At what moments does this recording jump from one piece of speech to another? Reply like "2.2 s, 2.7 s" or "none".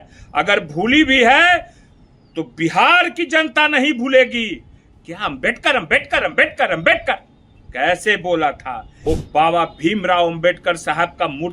8.9 s